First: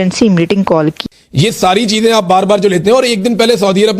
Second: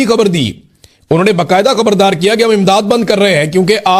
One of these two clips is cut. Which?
first; 1 cut; at 1.0 s

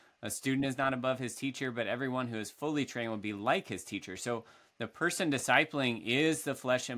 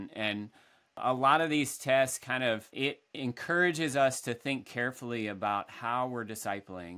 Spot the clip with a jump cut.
second; 2 cuts; at 1.0 s, 2.7 s

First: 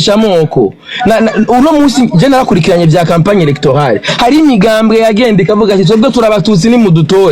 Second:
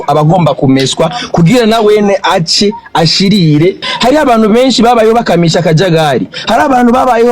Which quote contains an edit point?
second; 1 cut; at 3.9 s

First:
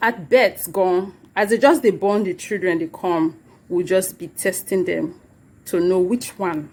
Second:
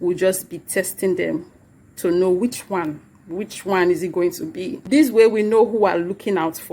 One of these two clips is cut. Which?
second; 1 cut; at 4.8 s

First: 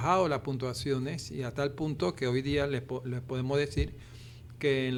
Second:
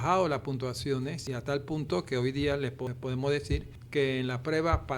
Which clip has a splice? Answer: second; 3 cuts; at 1.2 s, 2.9 s, 3.8 s

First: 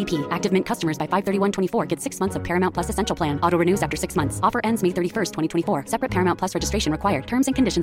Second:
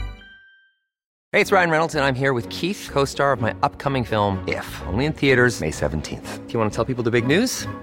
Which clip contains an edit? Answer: second; 1 cut; at 1.1 s

